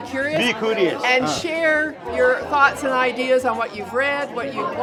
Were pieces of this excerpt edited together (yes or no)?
no